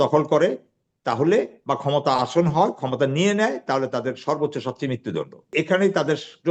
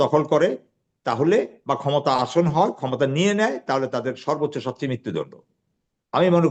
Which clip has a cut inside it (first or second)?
first